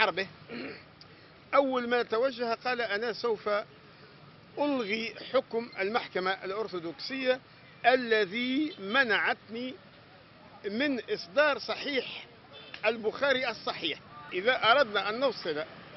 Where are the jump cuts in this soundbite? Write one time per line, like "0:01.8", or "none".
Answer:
0:14.3